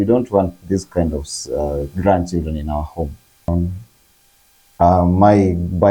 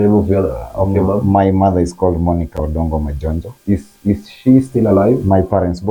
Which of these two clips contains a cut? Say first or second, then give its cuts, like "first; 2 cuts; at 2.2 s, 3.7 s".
first; 1 cut; at 3.5 s